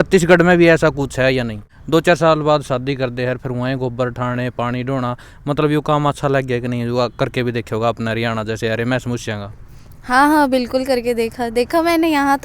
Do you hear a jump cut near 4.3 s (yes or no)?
no